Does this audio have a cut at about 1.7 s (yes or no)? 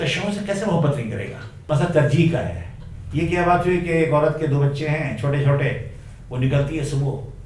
yes